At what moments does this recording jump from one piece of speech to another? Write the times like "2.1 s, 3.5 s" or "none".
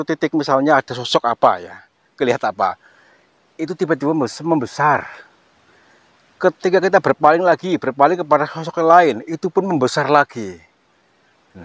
none